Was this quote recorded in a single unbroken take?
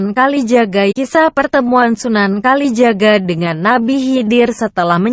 yes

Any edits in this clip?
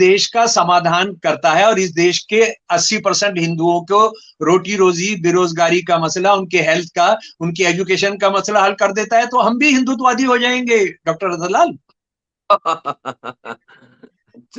no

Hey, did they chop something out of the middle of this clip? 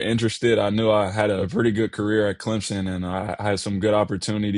yes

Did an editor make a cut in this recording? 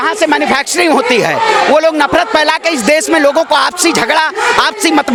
no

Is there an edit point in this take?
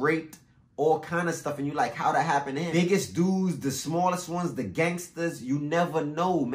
yes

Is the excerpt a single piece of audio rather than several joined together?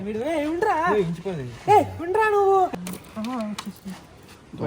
no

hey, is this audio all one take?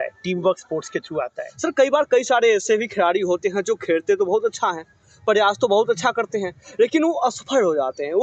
no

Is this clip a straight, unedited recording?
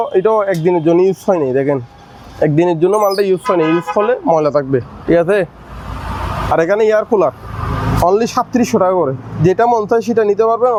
yes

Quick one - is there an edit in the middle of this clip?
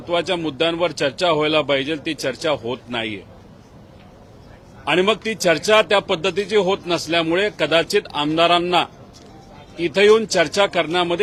no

